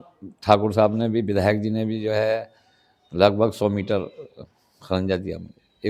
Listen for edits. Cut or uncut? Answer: uncut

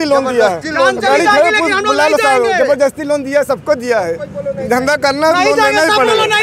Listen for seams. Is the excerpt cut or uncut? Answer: uncut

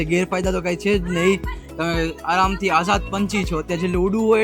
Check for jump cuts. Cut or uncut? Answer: uncut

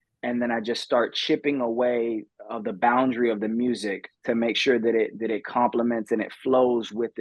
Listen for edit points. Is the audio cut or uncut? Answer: uncut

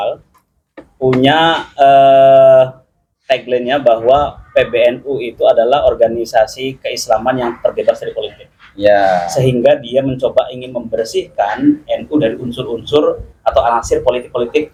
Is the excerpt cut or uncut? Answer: uncut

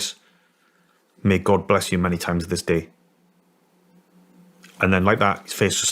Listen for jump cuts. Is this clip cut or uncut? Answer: uncut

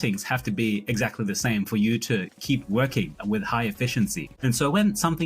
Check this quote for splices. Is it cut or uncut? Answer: cut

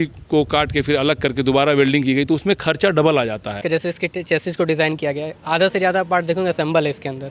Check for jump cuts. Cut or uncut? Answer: cut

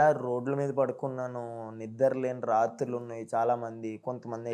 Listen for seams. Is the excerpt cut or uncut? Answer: uncut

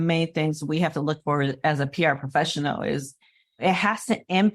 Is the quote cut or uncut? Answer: cut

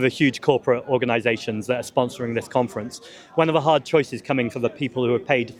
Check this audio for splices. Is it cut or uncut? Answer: uncut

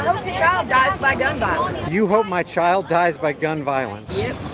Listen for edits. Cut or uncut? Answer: uncut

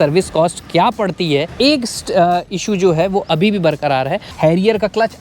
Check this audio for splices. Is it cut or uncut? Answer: cut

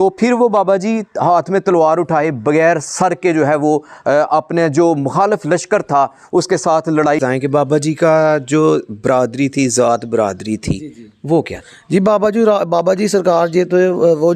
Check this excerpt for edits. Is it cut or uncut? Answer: cut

